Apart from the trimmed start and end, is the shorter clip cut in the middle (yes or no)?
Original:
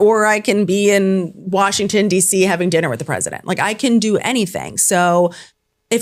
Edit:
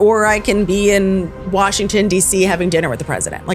no